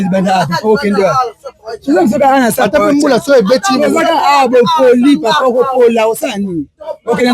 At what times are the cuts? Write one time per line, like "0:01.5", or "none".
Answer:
none